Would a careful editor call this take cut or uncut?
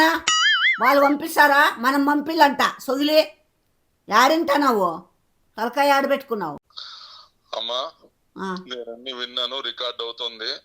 cut